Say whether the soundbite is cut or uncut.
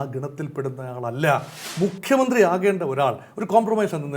cut